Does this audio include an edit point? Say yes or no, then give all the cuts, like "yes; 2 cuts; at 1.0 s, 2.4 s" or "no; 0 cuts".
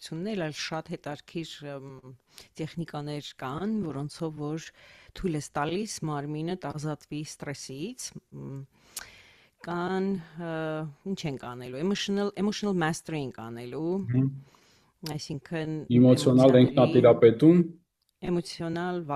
no; 0 cuts